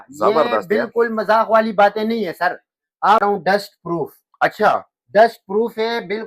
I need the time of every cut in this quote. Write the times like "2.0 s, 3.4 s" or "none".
3.2 s